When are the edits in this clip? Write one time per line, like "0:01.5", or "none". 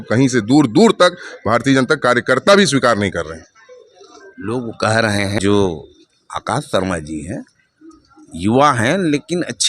0:05.4